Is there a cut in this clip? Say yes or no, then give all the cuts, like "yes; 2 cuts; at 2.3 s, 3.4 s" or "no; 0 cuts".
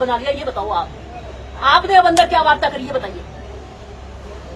no; 0 cuts